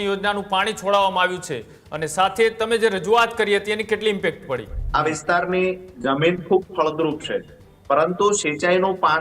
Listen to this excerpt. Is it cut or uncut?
cut